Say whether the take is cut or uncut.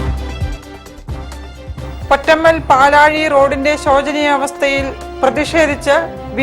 uncut